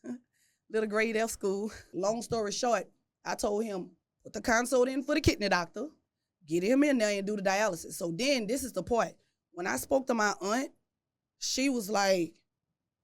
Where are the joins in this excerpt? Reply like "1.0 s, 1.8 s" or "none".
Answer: 1.9 s